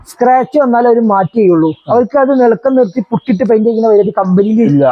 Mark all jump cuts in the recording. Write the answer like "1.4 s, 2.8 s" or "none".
none